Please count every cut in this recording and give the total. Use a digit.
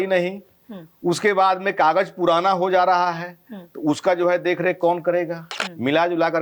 1